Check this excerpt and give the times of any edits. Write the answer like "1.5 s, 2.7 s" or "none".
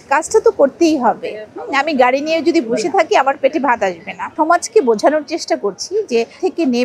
4.3 s